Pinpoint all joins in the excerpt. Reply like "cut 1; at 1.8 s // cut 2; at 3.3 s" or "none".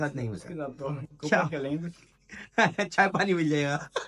none